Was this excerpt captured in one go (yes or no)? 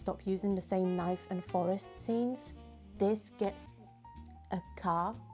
no